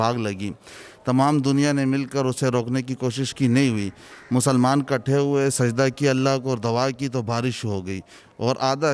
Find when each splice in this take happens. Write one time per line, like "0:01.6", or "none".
none